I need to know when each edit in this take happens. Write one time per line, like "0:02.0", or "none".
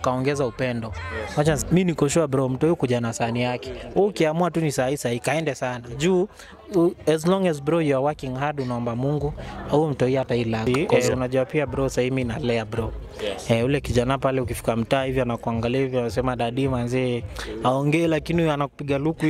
0:01.6
0:11.0